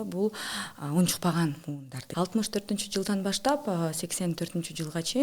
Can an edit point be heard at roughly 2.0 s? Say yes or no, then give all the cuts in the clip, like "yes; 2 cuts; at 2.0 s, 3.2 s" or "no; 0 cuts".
yes; 1 cut; at 2.0 s